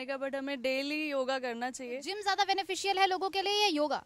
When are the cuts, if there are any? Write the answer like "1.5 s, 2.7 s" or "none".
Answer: 2.1 s